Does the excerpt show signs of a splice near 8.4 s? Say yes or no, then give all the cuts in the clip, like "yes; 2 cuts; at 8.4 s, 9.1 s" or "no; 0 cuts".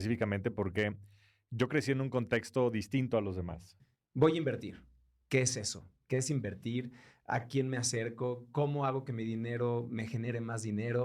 no; 1 cut; at 3.8 s